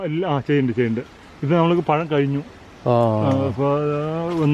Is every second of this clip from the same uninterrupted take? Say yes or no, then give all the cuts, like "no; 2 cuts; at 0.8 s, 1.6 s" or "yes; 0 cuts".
yes; 0 cuts